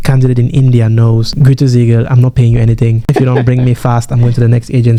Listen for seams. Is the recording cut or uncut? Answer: uncut